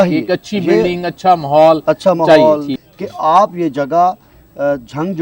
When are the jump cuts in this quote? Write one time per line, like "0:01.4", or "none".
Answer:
0:02.7

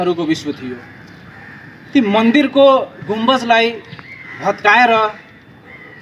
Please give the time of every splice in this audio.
none

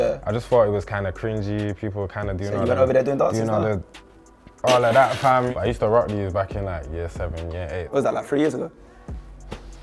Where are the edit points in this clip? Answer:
0:05.5
0:08.2

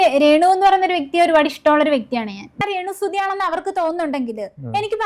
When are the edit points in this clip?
0:02.6

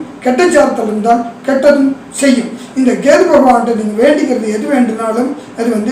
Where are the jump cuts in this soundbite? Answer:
none

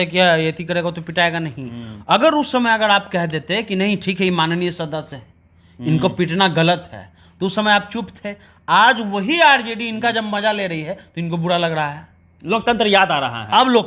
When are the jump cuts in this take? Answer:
none

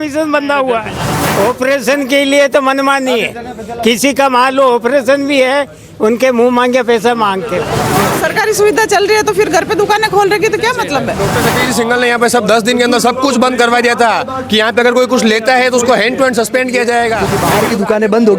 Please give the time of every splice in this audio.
0:01.1
0:07.8
0:11.3
0:17.4

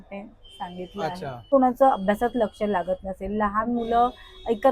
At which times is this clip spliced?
0:01.5

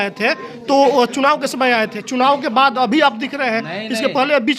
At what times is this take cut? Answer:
none

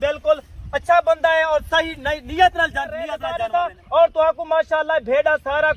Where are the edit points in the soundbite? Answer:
0:03.2

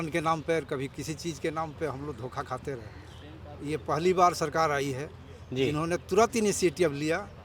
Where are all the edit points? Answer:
none

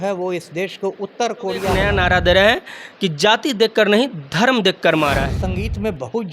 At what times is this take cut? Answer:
0:01.7
0:05.4

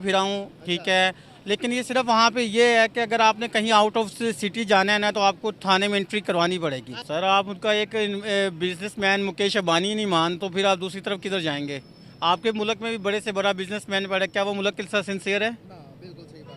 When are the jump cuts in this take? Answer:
0:06.9

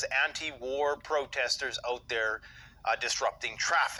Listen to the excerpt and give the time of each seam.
none

